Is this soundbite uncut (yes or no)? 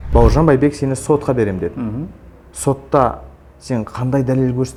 yes